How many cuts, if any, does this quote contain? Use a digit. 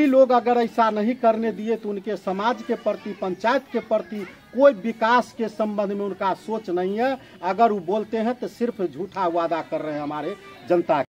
0